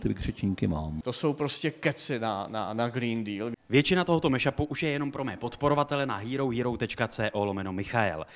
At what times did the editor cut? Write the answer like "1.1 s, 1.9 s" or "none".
none